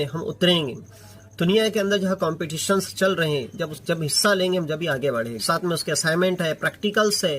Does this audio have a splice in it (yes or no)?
yes